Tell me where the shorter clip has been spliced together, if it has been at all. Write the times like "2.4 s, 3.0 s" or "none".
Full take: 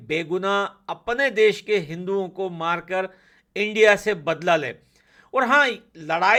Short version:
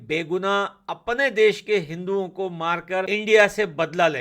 3.1 s